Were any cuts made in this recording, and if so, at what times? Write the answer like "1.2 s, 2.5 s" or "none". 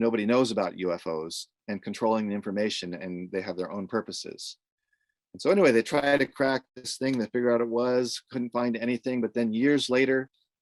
none